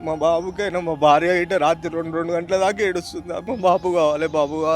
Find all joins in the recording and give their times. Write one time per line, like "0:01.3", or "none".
0:03.4